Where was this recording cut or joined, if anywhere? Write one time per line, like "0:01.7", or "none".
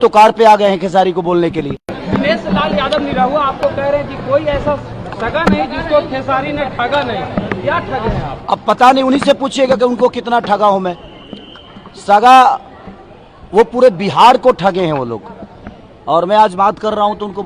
0:02.0